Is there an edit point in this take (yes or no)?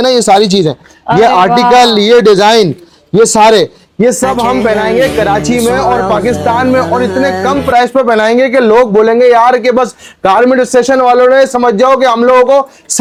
no